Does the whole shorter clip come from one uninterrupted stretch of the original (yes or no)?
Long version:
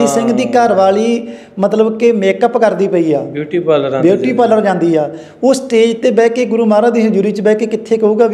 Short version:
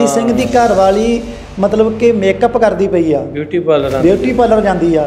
yes